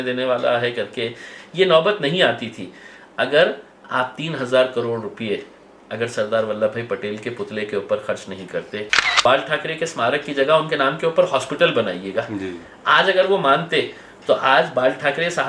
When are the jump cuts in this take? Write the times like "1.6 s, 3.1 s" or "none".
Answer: 9.1 s